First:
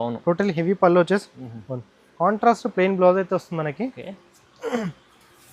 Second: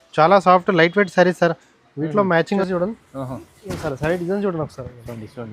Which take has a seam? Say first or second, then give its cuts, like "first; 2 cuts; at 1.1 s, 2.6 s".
second; 1 cut; at 2.7 s